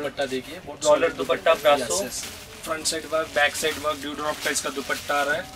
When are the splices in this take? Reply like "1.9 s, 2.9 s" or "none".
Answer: 2.2 s